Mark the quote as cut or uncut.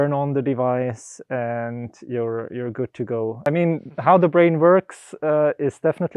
cut